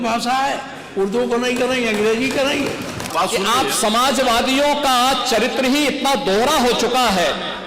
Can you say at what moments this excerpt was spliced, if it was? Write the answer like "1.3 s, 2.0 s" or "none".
3.0 s

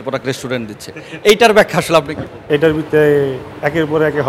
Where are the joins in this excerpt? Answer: 2.4 s

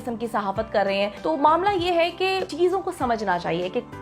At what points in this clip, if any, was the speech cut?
1.2 s, 2.5 s

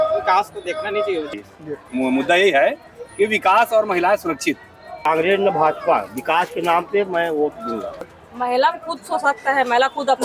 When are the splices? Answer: 1.3 s, 5.0 s, 8.0 s

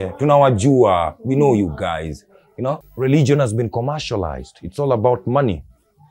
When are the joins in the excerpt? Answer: 2.9 s

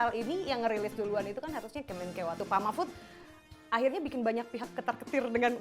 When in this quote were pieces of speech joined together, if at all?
2.4 s

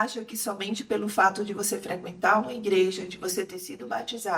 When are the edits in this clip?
none

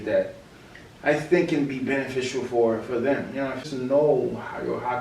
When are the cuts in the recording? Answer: 3.6 s

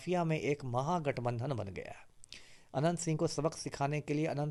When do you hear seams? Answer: none

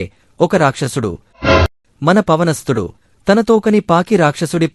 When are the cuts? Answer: 1.5 s

